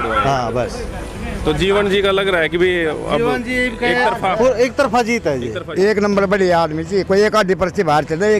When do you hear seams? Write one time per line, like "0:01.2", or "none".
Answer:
0:05.6